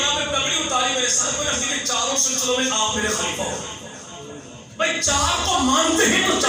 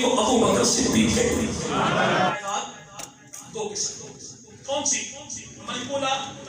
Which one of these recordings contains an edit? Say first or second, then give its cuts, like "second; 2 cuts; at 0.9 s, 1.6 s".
second; 1 cut; at 2.3 s